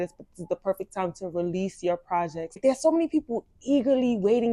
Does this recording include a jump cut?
yes; 1 cut; at 2.5 s

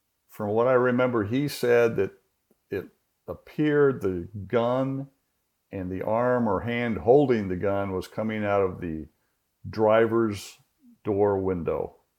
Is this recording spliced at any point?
no; 0 cuts

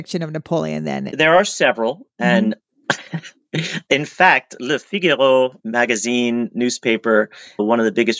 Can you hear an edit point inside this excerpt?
yes; 1 cut; at 1.1 s

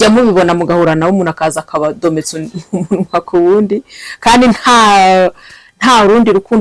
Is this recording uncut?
yes; 0 cuts

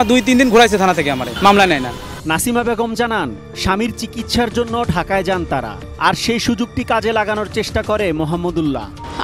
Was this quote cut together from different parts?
no; 0 cuts

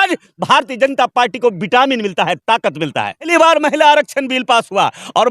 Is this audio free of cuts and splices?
no; 1 cut; at 3.3 s

